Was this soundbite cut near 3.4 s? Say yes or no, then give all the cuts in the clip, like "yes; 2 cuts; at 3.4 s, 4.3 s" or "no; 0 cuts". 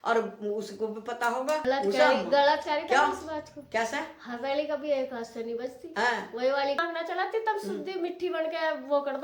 no; 2 cuts; at 1.6 s, 6.8 s